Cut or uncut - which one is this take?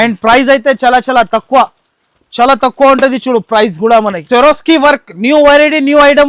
cut